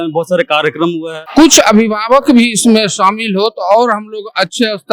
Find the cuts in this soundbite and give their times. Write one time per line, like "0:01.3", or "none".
0:01.1